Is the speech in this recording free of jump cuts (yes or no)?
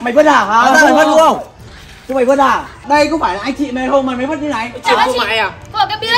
no